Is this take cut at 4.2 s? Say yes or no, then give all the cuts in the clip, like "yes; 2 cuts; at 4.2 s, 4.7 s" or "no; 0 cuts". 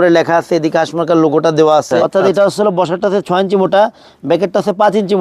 no; 1 cut; at 2.1 s